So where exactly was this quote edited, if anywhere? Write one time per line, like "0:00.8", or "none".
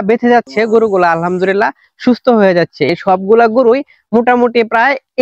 0:02.9